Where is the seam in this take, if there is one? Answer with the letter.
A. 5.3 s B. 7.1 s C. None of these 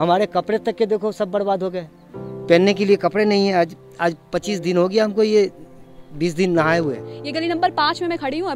B